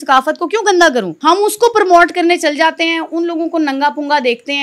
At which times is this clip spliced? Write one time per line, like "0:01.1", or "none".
0:01.1